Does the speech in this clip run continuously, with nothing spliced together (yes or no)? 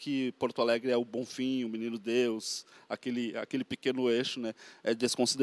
yes